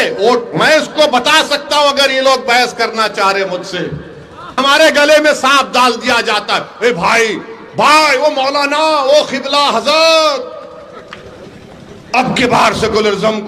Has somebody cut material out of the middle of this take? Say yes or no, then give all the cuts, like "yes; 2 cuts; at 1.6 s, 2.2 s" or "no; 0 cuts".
yes; 1 cut; at 4.8 s